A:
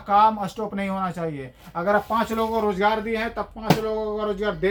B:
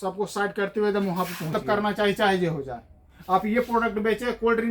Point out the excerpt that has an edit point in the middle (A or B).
B